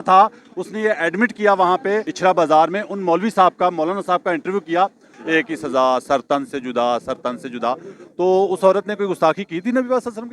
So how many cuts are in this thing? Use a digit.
2